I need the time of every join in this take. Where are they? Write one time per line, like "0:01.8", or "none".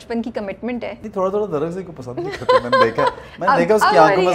0:01.0